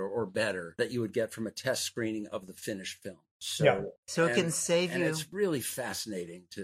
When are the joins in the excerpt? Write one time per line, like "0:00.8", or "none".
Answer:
none